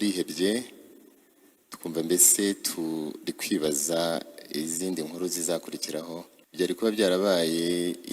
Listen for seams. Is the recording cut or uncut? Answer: cut